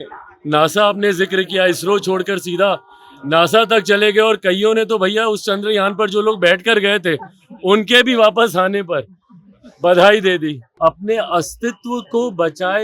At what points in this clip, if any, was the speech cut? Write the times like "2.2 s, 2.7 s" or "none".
10.6 s